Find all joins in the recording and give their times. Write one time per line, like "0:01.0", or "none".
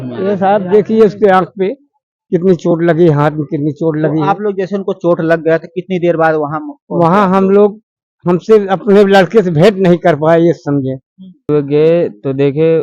0:11.4